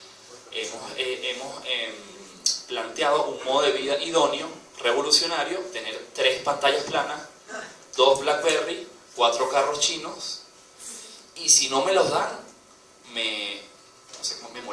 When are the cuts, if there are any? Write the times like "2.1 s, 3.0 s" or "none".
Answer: none